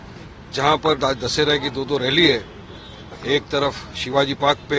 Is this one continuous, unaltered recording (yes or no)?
yes